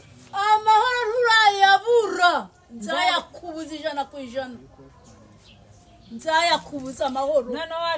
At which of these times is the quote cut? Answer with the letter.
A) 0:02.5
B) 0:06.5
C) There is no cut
C